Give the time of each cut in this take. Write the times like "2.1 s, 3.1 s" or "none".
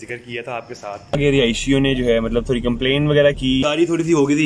1.1 s, 3.6 s